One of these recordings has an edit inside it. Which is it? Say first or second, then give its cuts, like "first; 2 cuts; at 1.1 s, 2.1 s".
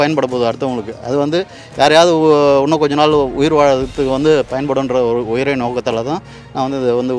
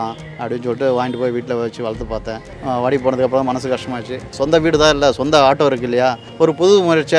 second; 3 cuts; at 2.5 s, 4.3 s, 6.2 s